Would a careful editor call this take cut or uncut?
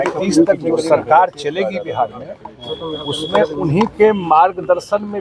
uncut